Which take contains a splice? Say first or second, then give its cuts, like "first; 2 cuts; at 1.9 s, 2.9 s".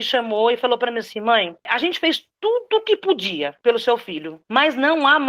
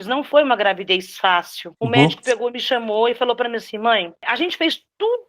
second; 1 cut; at 1.6 s